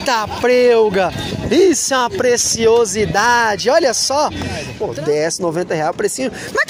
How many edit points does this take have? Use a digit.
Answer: 1